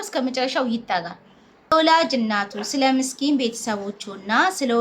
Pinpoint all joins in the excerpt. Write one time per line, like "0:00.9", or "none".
0:01.7